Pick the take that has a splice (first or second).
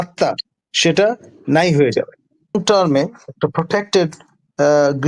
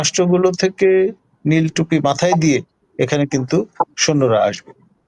first